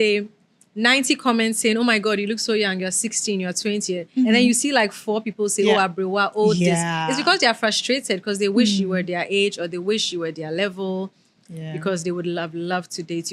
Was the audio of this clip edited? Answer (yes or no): no